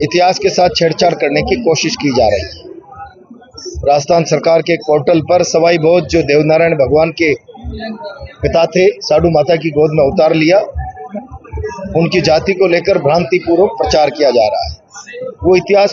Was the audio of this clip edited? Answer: no; 0 cuts

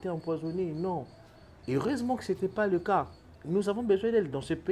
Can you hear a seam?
yes; 1 cut; at 3.3 s

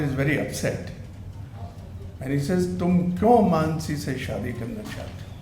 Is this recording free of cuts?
yes; 0 cuts

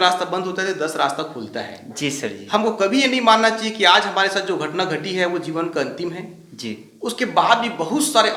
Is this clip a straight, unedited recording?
yes; 0 cuts

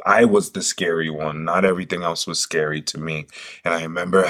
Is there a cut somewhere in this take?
no; 0 cuts

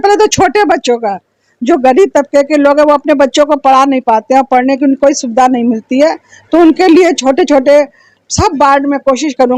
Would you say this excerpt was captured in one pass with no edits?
yes; 0 cuts

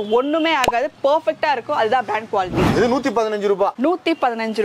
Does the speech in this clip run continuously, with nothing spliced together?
no; 1 cut; at 2.7 s

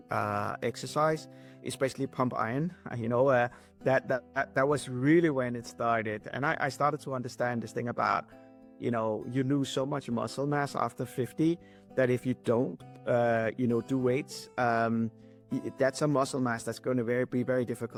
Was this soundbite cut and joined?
no; 0 cuts

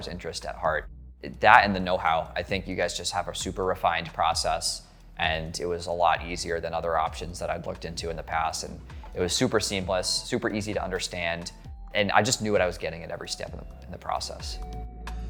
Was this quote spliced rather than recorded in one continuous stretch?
no; 0 cuts

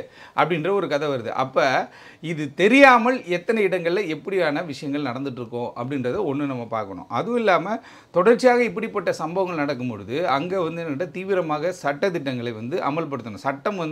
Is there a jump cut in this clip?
no; 0 cuts

